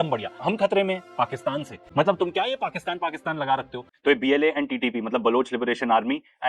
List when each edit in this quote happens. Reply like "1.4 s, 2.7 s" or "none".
1.8 s, 3.8 s